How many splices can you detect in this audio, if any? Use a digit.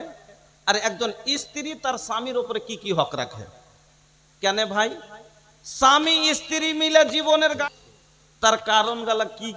1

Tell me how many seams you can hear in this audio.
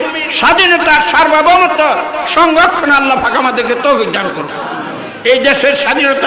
0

